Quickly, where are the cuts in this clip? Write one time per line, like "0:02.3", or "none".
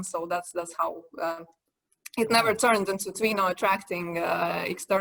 none